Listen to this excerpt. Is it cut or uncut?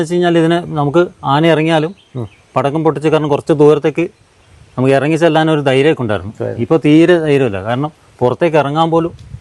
uncut